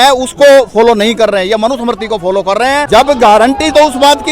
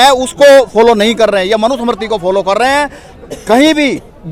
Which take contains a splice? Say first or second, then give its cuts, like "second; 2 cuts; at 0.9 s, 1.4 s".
first; 1 cut; at 2.8 s